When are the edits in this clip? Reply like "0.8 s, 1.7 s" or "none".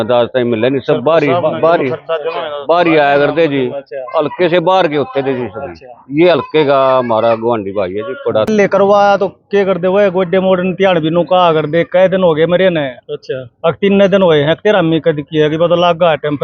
8.5 s